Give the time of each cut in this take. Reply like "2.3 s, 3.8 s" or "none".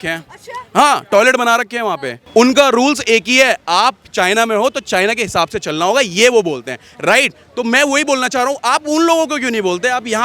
2.1 s